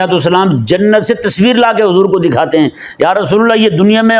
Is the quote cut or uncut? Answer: uncut